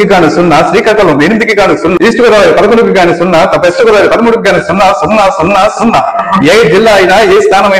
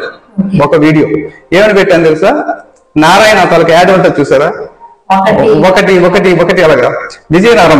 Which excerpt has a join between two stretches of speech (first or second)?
first